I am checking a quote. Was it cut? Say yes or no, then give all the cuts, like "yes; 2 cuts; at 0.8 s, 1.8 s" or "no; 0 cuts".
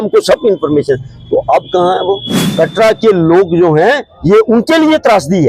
yes; 1 cut; at 2.4 s